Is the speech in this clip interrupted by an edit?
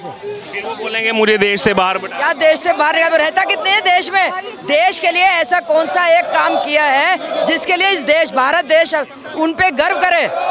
no; 0 cuts

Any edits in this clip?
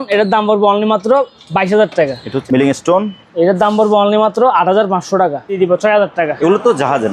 yes; 2 cuts; at 2.3 s, 5.6 s

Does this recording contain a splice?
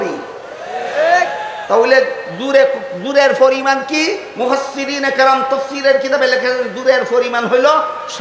no; 0 cuts

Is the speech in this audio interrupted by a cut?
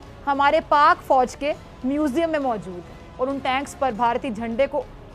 no; 0 cuts

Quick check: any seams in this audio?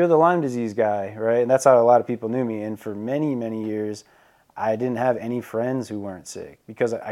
no; 0 cuts

